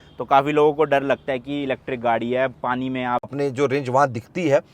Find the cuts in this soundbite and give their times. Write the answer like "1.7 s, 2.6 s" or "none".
3.3 s